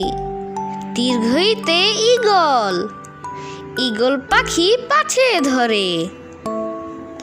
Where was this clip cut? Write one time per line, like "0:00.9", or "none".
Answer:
0:06.3